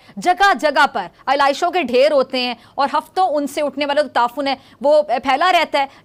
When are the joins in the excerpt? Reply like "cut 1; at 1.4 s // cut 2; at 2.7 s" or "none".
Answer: none